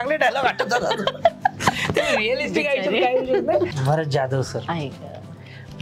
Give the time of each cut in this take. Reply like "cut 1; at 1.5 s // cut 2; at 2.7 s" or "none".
cut 1; at 3.7 s